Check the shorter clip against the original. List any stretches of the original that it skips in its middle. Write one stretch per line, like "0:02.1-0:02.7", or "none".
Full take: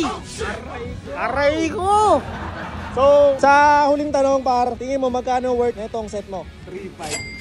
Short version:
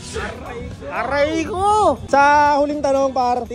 0:02.3-0:03.4